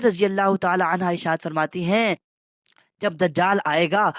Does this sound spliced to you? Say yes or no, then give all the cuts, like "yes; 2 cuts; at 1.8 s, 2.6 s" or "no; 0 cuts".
no; 0 cuts